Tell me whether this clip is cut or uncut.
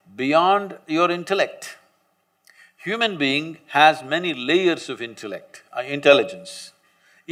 uncut